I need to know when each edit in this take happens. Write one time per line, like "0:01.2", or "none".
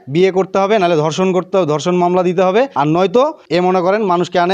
0:02.7
0:03.4